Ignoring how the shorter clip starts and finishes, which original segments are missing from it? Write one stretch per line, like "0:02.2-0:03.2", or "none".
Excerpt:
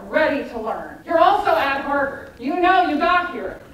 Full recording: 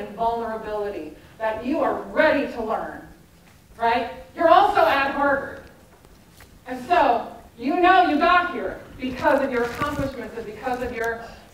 0:03.0-0:04.2
0:05.6-0:07.5

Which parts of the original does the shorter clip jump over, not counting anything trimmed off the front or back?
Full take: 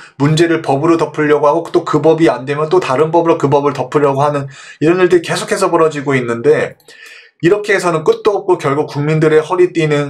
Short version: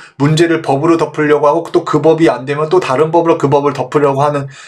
none

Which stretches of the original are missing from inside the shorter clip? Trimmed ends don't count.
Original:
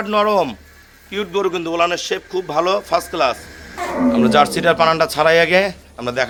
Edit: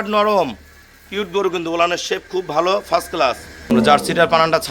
0:03.7-0:04.2

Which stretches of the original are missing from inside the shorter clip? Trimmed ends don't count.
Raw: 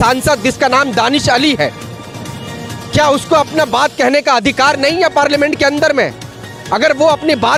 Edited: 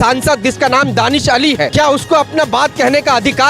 0:01.7-0:02.9

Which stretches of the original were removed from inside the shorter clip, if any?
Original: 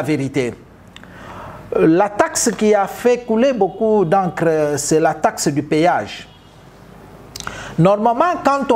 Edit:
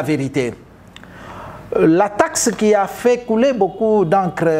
none

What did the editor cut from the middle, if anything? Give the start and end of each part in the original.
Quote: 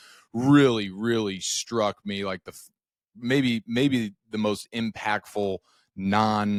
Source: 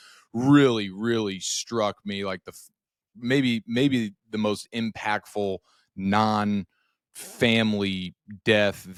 none

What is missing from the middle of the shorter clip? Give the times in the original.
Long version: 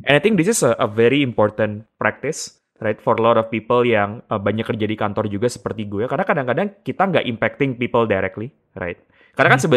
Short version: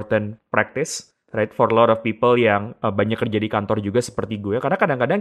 none

